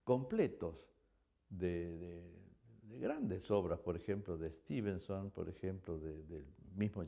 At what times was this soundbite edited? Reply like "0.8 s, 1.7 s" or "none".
2.7 s